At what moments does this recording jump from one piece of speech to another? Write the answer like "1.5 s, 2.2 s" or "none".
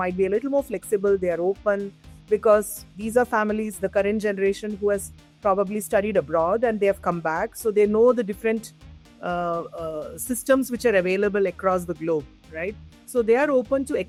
none